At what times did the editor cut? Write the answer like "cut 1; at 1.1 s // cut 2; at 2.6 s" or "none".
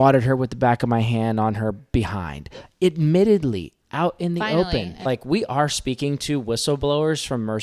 cut 1; at 5.0 s